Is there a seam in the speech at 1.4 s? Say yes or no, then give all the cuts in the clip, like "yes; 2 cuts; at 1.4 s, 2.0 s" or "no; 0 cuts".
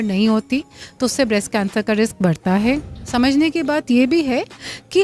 no; 1 cut; at 3.0 s